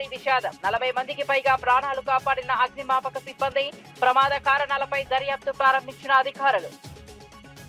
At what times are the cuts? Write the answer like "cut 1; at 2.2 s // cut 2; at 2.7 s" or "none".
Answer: none